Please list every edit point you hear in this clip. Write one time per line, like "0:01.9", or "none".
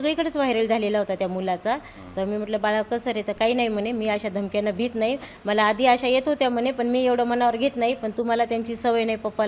none